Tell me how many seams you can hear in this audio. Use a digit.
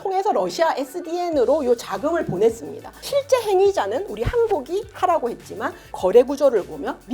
2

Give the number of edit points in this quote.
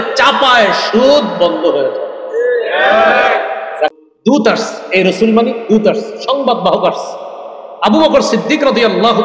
1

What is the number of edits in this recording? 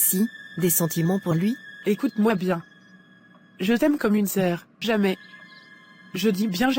2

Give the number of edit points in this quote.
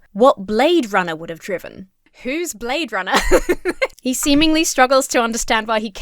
1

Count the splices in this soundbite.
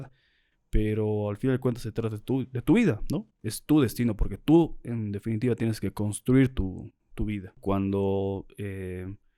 1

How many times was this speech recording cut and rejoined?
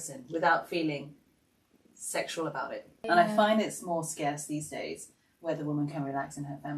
1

